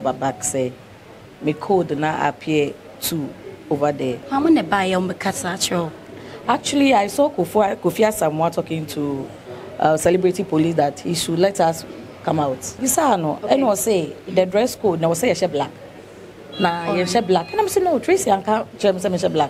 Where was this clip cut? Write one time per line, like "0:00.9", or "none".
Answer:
0:04.2
0:12.8